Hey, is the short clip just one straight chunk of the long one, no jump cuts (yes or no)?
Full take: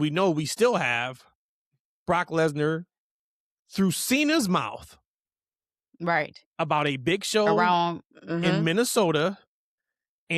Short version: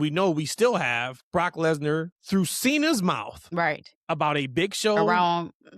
no